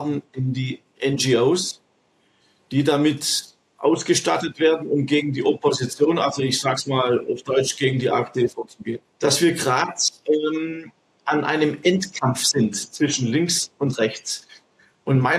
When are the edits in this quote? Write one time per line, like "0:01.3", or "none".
0:09.1